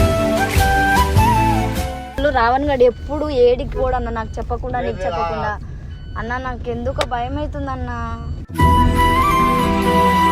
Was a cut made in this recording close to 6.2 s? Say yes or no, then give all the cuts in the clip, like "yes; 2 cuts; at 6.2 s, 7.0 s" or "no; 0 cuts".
no; 1 cut; at 2.2 s